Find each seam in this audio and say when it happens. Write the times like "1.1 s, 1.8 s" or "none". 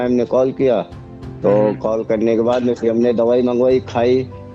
none